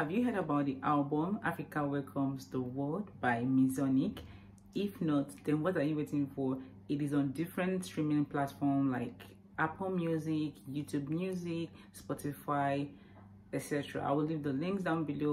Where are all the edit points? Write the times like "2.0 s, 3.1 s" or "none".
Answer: none